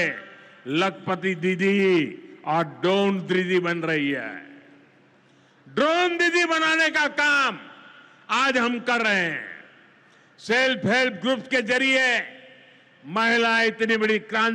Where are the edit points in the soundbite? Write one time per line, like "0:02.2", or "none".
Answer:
none